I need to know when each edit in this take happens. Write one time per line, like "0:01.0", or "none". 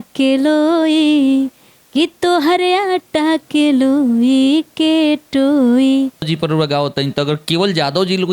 0:06.3